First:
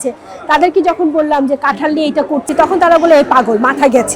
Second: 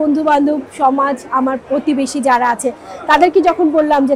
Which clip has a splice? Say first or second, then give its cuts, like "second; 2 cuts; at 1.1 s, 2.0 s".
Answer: first; 1 cut; at 2.5 s